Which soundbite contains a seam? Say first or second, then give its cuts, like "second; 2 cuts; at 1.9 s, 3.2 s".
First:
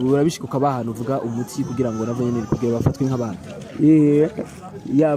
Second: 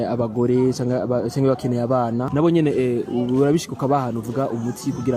second; 1 cut; at 2.2 s